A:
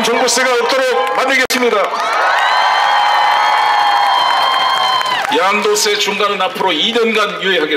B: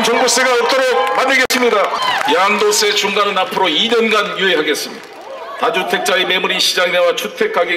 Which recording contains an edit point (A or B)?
B